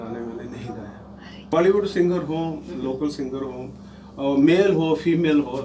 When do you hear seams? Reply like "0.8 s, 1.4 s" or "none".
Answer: 1.5 s